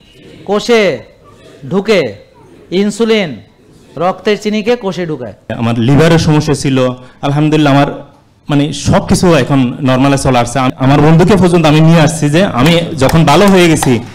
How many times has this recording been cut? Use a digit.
2